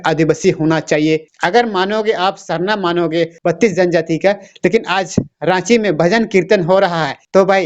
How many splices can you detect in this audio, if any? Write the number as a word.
one